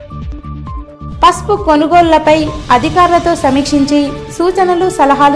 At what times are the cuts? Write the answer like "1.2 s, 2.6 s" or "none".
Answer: 1.1 s